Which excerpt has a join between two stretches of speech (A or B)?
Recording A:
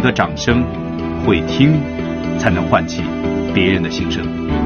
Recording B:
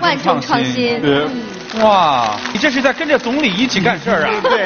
B